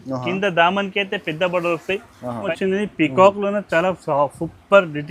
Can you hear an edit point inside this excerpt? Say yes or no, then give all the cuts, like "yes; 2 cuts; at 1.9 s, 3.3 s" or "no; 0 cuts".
yes; 1 cut; at 2.4 s